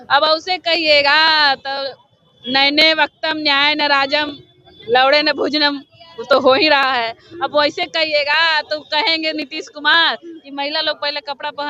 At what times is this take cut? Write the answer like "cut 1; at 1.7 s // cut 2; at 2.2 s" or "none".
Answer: none